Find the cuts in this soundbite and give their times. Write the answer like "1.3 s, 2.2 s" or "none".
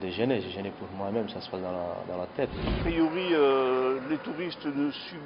2.7 s